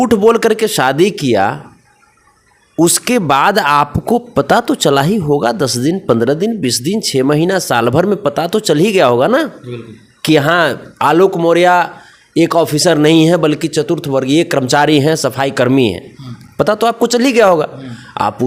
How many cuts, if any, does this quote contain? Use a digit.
0